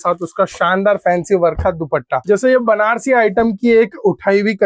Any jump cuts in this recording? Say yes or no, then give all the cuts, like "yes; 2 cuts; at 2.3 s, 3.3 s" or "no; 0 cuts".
yes; 1 cut; at 2.1 s